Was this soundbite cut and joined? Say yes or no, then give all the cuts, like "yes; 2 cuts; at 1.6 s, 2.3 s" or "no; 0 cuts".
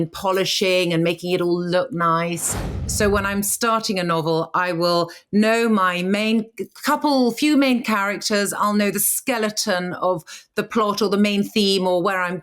yes; 1 cut; at 2.9 s